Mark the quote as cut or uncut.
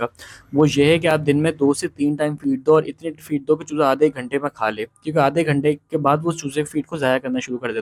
uncut